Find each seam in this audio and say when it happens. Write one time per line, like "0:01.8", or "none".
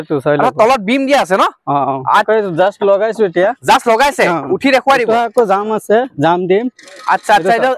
0:02.1